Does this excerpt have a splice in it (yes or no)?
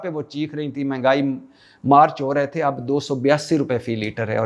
no